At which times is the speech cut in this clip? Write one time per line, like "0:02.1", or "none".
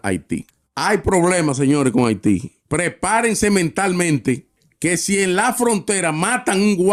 none